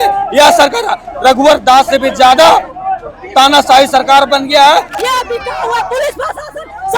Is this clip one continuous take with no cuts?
no; 1 cut; at 5.0 s

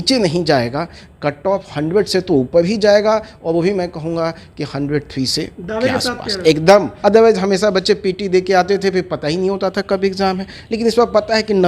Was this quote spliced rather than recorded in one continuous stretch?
yes; 1 cut; at 6.9 s

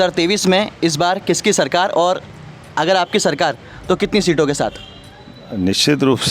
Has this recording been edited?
no; 0 cuts

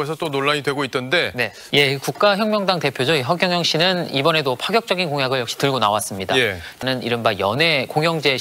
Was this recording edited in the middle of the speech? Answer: yes; 2 cuts; at 1.6 s, 6.8 s

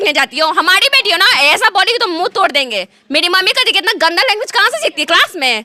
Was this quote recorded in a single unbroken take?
yes; 0 cuts

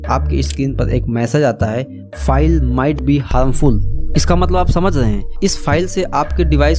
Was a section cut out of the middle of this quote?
no; 0 cuts

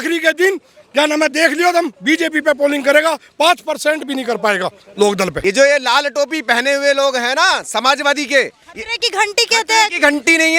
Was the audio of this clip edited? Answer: yes; 1 cut; at 5.4 s

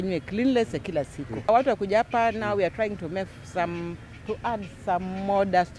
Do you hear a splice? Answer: yes; 1 cut; at 1.5 s

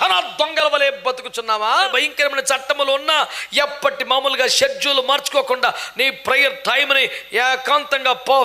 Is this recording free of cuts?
no; 1 cut; at 1.9 s

